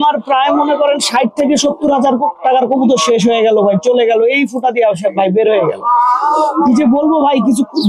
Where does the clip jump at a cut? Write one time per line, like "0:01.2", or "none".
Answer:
none